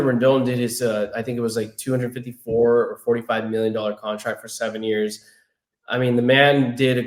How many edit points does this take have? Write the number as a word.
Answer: zero